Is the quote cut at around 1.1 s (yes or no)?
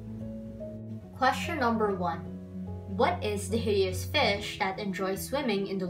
yes